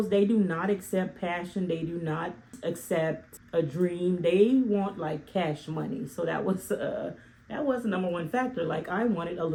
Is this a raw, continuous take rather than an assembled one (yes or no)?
yes